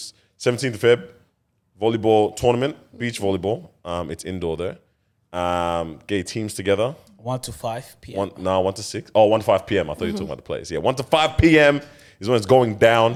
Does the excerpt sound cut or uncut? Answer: uncut